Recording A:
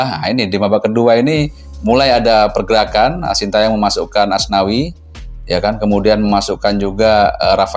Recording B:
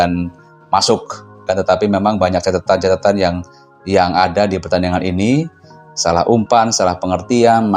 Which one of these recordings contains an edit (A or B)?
B